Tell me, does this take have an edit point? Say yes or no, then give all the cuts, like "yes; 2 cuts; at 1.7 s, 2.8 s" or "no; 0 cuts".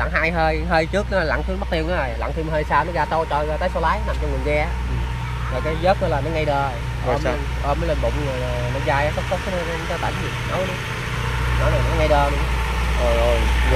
no; 0 cuts